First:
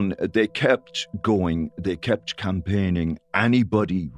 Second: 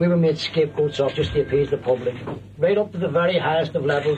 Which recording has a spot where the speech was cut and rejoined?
second; 1 cut; at 2.5 s

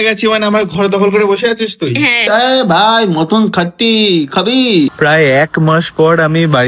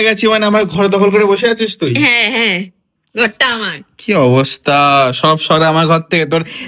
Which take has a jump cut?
second; 1 cut; at 2.2 s

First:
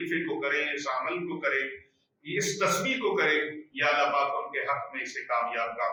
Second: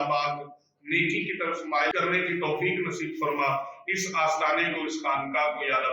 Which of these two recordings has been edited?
second; 1 cut; at 1.9 s

